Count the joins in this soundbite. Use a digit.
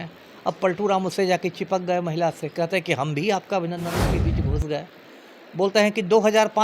1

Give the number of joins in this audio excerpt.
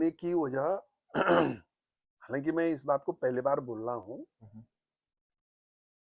0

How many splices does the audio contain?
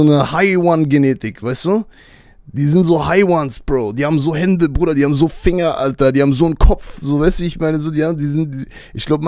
0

